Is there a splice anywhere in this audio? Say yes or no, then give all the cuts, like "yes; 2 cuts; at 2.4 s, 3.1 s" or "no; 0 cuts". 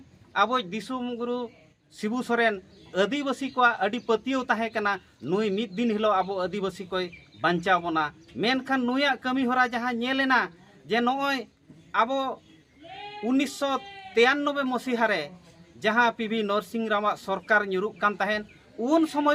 no; 0 cuts